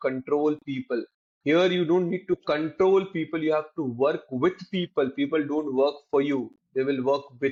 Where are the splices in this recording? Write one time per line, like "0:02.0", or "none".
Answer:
none